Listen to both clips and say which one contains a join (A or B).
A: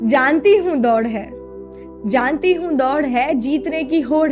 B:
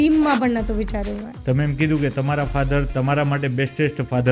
B